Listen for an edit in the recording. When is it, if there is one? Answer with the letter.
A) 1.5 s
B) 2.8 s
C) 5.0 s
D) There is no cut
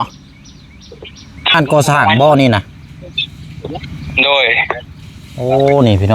A